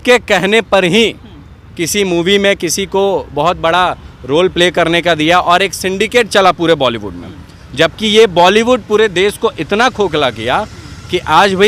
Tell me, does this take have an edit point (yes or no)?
no